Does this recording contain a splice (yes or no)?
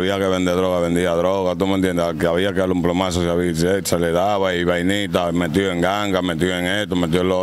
no